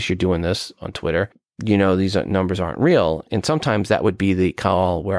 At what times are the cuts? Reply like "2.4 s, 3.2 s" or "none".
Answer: 1.4 s, 3.2 s

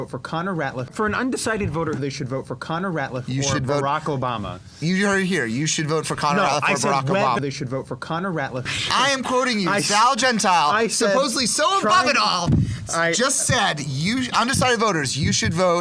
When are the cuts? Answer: 0.9 s, 2.0 s, 7.4 s, 8.7 s

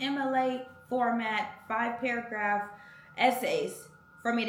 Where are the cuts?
none

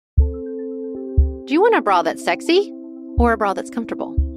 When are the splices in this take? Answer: 1.3 s

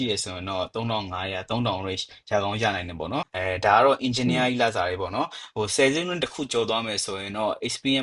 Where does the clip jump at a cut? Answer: 3.3 s

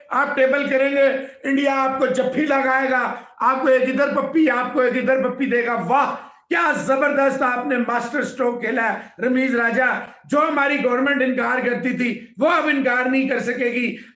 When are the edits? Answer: none

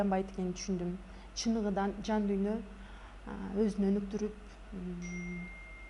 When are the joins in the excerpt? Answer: none

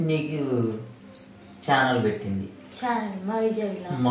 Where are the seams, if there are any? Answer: none

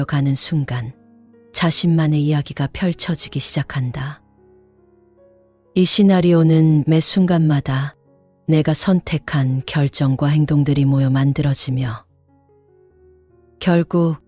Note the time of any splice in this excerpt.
12.1 s, 13.6 s

